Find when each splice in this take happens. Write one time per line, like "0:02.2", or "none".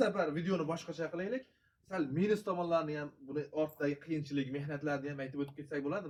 none